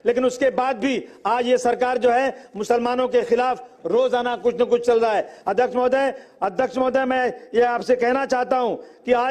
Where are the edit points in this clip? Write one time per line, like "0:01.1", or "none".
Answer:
none